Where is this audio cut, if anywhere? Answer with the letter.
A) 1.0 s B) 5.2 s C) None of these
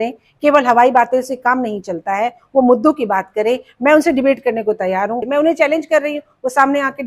B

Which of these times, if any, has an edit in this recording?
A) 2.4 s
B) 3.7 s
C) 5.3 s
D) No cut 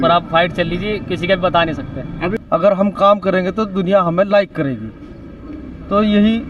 A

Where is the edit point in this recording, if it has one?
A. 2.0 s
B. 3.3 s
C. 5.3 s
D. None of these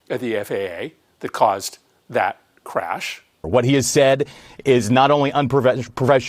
B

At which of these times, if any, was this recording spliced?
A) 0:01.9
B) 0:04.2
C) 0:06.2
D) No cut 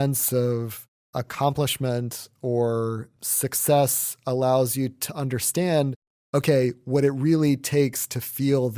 C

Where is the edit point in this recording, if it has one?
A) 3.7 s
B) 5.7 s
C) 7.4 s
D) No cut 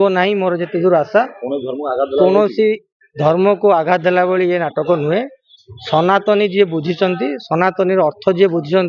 D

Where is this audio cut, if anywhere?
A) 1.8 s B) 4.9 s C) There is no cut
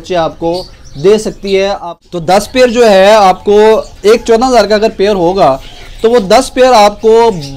A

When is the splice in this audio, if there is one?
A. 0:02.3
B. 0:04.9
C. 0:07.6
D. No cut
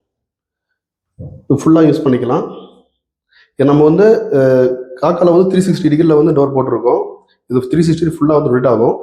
D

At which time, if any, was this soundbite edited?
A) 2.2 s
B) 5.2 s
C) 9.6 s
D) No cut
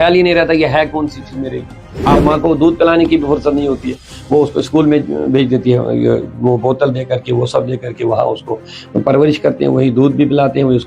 A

